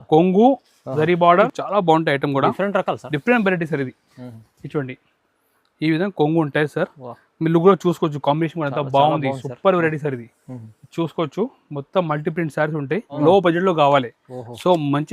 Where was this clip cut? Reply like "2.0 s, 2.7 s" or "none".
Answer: 1.6 s, 13.1 s